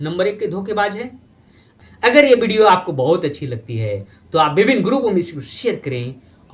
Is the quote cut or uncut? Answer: cut